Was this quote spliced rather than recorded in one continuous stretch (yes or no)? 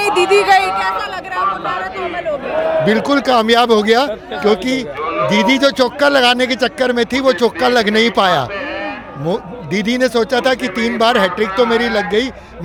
no